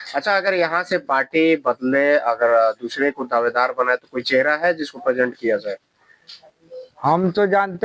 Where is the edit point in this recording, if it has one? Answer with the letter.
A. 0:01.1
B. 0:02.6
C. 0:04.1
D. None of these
D